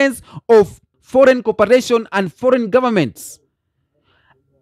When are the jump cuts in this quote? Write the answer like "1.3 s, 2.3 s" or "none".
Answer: 0.9 s